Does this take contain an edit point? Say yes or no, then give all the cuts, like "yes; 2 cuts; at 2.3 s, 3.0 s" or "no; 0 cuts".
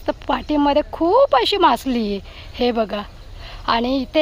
no; 0 cuts